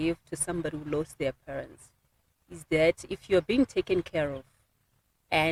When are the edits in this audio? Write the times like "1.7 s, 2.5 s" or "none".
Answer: none